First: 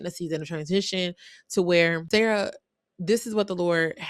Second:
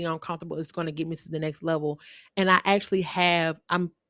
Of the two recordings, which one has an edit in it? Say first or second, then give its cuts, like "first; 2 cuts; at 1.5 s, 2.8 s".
first; 1 cut; at 2.0 s